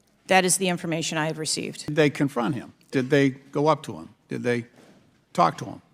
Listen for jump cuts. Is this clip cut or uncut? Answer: cut